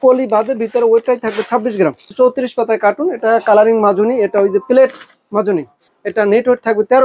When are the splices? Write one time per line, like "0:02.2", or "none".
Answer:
0:02.1
0:05.7